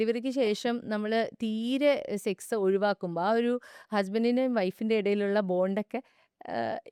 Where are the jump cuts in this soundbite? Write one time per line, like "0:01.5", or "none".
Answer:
none